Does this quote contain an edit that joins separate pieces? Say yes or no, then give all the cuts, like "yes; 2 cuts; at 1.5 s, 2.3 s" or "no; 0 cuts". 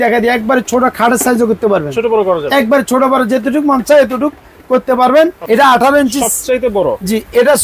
yes; 1 cut; at 5.4 s